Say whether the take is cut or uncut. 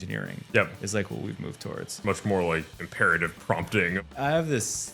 cut